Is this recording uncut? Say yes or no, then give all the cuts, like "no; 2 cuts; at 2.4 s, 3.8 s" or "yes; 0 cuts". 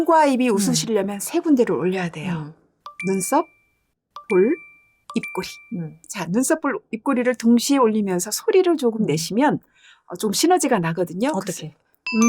no; 1 cut; at 6.1 s